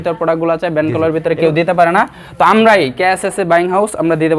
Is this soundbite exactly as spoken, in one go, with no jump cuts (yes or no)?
yes